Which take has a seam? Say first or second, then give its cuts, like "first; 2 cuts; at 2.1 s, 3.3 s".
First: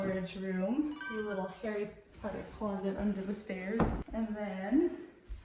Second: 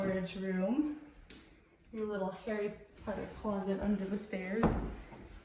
first; 2 cuts; at 1.0 s, 4.0 s